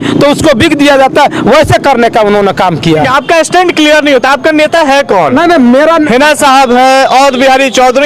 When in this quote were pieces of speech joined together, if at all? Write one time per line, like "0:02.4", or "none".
0:03.1